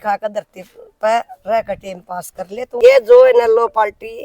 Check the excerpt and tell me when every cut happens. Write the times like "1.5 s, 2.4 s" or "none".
2.8 s

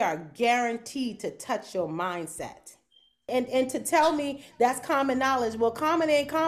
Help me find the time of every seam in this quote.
3.3 s

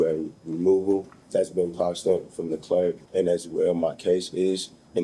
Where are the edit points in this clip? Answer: 1.2 s, 3.0 s

